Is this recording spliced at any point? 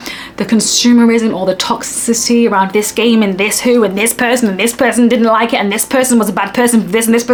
no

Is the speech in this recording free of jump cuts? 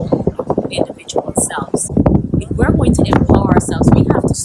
no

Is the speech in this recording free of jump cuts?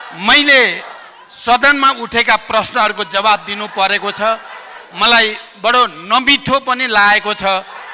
yes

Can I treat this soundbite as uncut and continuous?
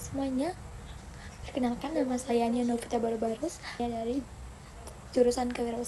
no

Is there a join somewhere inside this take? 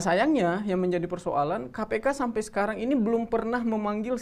no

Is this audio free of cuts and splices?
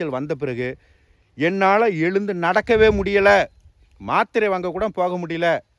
yes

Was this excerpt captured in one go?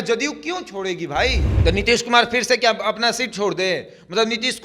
no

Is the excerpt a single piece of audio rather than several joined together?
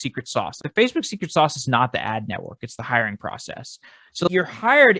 yes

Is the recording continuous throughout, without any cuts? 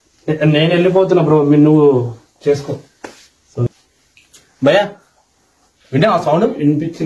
no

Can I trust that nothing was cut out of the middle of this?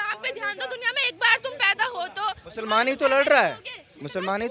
yes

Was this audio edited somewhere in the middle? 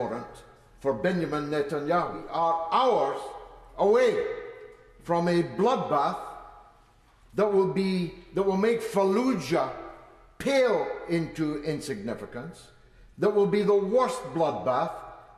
yes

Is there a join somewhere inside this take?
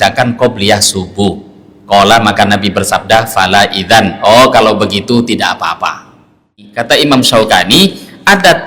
yes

